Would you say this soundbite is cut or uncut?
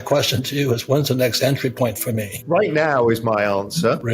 cut